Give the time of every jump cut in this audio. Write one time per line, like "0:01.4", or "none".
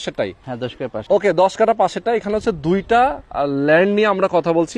0:01.0

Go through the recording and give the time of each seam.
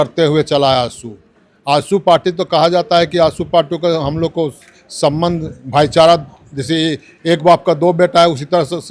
none

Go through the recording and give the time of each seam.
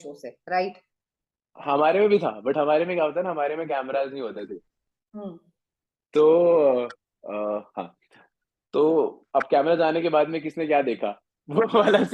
none

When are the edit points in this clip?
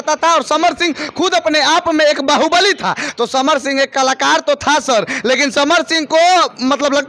none

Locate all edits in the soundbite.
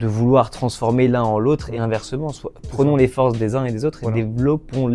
0:04.0

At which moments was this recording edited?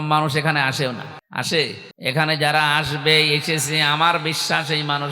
0:01.2
0:01.9

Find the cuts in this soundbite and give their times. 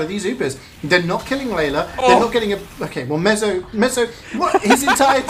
none

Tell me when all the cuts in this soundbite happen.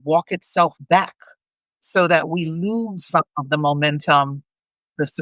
none

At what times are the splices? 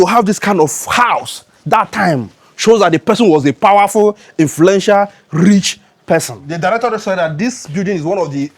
0:06.4

